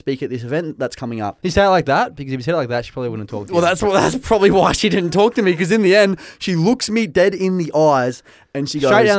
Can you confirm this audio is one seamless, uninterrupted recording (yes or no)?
no